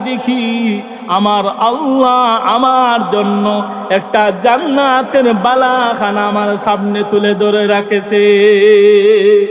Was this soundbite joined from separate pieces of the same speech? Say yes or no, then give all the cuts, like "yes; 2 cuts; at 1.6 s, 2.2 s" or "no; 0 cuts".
no; 0 cuts